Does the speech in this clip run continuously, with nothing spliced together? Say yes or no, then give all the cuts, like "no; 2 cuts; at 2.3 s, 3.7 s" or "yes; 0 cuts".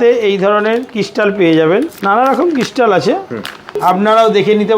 no; 2 cuts; at 1.9 s, 3.7 s